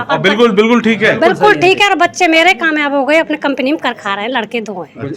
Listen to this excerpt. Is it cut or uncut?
uncut